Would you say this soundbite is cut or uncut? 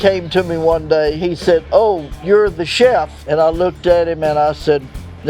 cut